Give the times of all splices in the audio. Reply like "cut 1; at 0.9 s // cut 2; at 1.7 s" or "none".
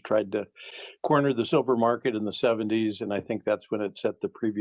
none